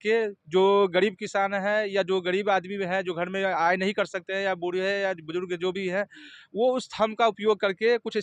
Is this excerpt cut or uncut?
uncut